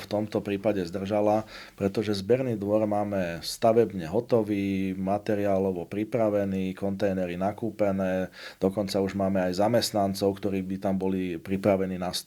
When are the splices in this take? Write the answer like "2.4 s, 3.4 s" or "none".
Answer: none